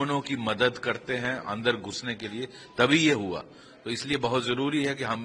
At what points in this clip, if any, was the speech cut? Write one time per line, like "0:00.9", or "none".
none